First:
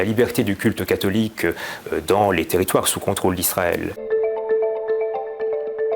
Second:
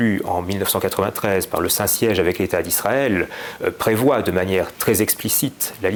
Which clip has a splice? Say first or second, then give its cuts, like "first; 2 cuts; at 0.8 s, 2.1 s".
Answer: first; 1 cut; at 4.0 s